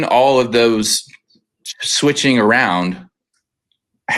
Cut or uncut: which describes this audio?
uncut